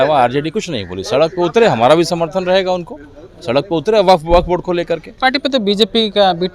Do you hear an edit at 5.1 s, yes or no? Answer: yes